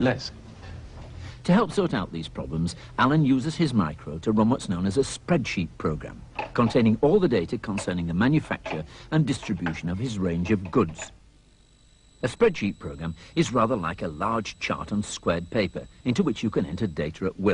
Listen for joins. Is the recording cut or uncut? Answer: cut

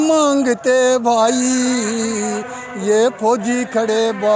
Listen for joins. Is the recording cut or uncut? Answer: uncut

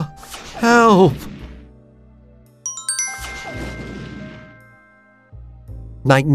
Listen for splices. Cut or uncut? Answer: uncut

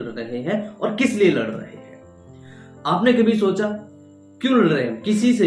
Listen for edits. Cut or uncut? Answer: uncut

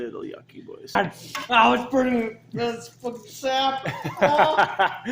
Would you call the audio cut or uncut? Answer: cut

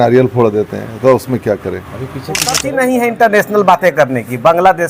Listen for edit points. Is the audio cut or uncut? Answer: cut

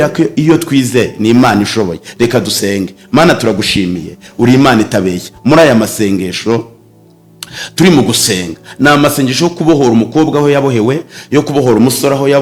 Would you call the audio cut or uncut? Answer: uncut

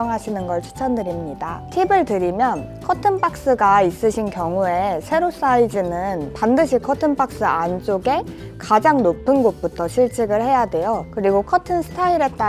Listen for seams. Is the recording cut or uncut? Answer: uncut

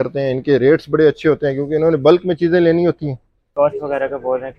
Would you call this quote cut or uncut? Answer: cut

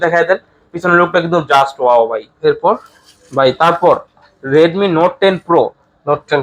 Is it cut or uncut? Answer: uncut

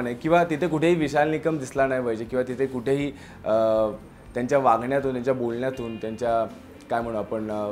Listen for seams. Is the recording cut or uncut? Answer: uncut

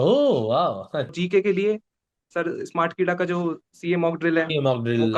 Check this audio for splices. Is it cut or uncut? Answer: cut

